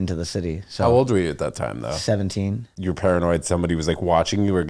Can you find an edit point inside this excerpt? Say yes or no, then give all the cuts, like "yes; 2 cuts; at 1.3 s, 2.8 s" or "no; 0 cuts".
yes; 1 cut; at 2.7 s